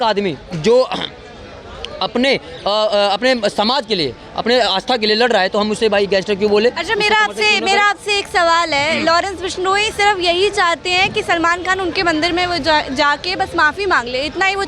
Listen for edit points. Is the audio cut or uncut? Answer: uncut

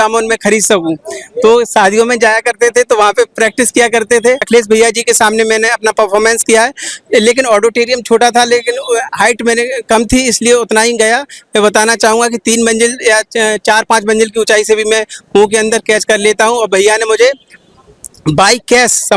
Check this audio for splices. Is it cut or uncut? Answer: cut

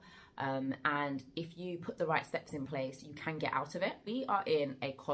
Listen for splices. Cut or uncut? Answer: cut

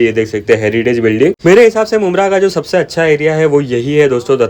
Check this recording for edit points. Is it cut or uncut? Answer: cut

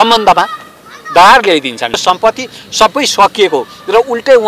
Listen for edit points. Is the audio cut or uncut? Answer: cut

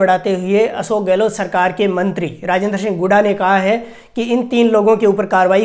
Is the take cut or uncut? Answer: uncut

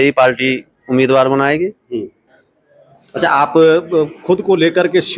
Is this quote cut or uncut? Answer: uncut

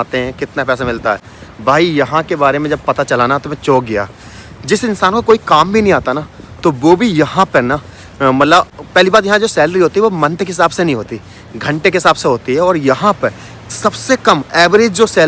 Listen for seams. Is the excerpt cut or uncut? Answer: uncut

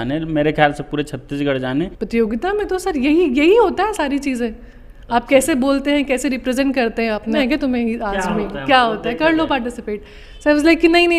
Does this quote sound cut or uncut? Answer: cut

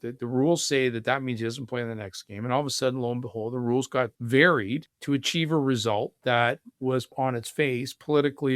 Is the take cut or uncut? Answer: cut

